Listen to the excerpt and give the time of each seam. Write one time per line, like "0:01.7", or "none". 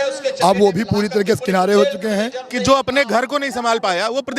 0:02.4